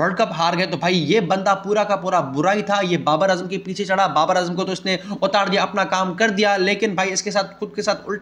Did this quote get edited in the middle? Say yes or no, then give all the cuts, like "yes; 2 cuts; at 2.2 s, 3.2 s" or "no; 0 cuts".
no; 0 cuts